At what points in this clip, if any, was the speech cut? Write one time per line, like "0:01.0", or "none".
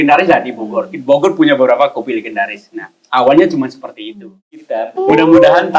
0:04.9